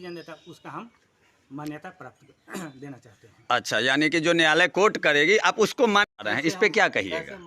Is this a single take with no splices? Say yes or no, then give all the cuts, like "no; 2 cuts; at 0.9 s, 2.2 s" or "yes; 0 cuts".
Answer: no; 1 cut; at 6.1 s